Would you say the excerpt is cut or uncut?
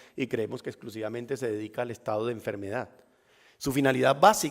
cut